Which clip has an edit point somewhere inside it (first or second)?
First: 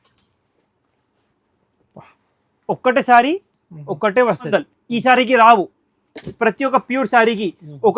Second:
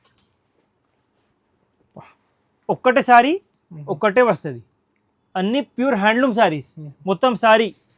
first